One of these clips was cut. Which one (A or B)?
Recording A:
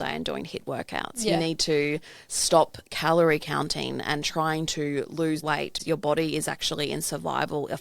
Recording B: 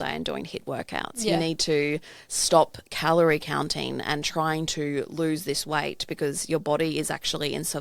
A